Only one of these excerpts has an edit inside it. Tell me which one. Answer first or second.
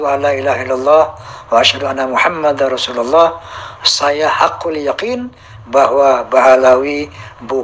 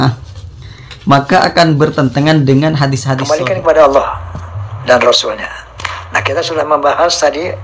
second